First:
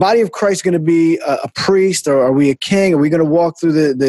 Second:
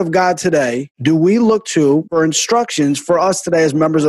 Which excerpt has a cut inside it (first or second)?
second